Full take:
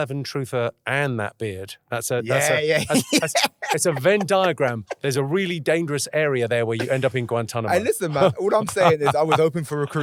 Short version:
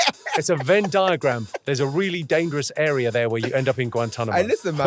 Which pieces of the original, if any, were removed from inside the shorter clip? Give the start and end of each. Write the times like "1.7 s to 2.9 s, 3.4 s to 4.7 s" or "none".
none

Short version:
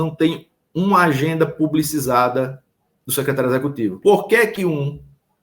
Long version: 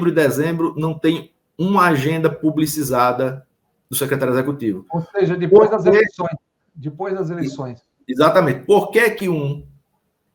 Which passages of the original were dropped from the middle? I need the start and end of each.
4.8 s to 8.6 s

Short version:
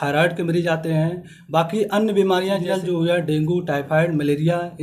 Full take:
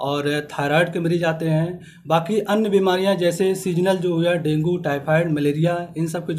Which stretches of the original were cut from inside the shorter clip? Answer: 3.2 s to 3.8 s

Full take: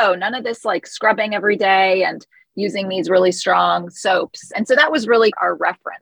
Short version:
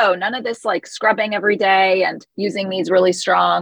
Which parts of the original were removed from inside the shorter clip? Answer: 2.3 s to 2.4 s

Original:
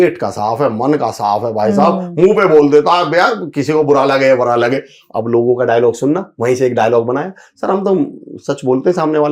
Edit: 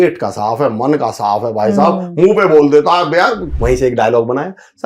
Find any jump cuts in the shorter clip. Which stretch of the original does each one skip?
3.5 s to 6.3 s

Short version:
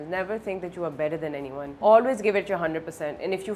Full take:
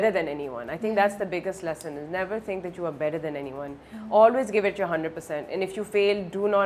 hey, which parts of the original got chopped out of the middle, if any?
3.7 s to 4.0 s

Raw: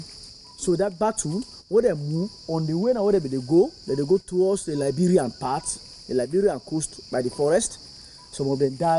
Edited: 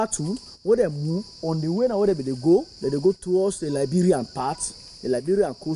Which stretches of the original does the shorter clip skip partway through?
none

